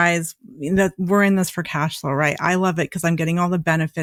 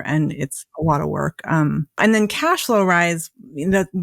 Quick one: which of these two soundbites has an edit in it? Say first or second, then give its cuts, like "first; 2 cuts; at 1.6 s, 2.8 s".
second; 1 cut; at 2.0 s